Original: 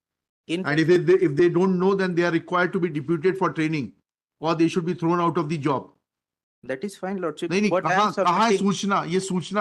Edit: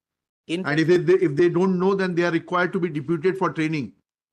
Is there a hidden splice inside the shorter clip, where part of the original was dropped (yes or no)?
no